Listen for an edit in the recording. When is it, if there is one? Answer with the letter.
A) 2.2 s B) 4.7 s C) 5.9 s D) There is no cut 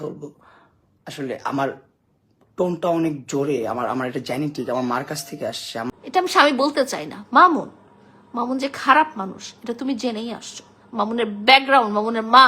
C